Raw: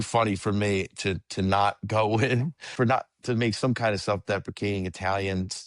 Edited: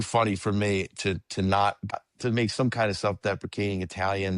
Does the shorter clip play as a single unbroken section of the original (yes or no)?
no